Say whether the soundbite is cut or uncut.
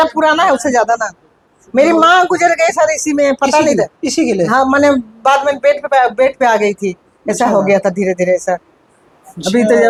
uncut